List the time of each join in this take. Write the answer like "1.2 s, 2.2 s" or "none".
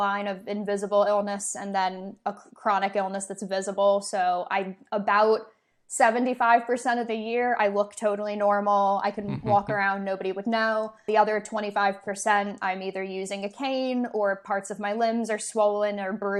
none